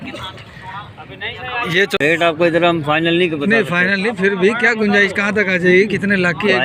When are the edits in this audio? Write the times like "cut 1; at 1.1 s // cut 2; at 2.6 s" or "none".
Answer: cut 1; at 2.1 s